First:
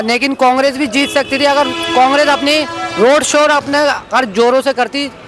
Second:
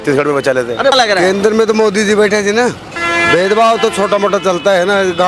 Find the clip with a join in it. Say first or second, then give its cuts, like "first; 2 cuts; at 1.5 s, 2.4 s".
second; 2 cuts; at 0.9 s, 2.9 s